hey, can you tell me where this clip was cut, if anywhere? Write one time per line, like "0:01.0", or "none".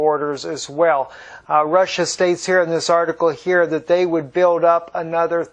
0:03.4

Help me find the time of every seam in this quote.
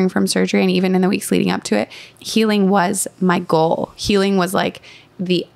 0:02.2

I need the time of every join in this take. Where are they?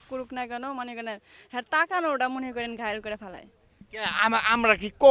none

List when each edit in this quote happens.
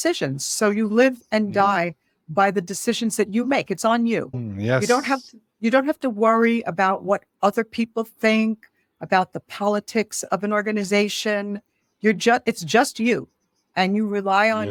none

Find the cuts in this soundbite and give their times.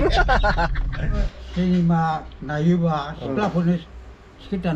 0:01.3

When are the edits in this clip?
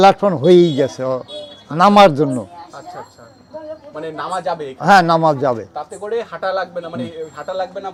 none

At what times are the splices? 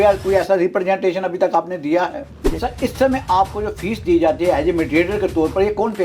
0:02.5

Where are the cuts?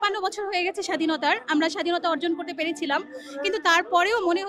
none

